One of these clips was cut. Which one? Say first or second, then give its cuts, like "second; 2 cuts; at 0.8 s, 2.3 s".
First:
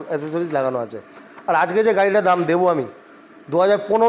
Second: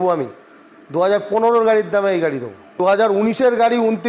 second; 1 cut; at 2.8 s